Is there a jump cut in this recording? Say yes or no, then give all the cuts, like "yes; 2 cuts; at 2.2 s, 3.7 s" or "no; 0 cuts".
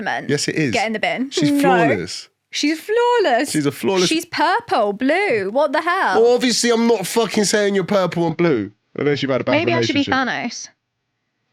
no; 0 cuts